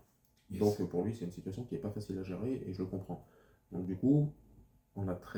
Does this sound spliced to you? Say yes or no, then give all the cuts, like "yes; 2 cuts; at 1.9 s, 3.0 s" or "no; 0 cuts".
no; 0 cuts